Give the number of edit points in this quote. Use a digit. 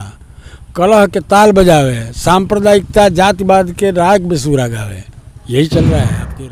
0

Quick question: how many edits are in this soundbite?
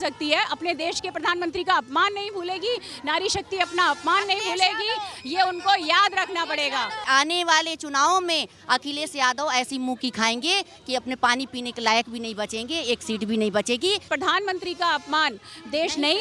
2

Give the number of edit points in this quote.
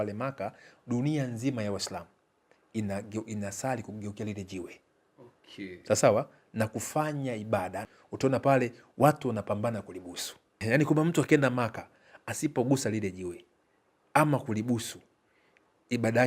2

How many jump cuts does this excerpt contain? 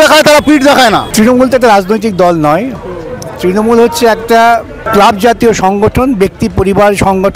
2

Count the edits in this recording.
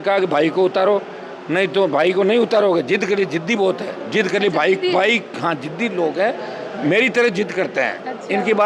0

